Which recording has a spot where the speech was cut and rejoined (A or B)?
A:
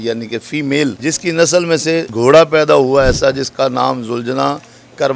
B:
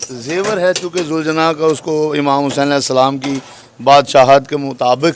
A